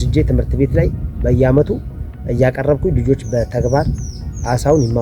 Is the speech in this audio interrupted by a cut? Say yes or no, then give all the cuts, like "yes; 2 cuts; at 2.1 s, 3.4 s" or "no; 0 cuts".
no; 0 cuts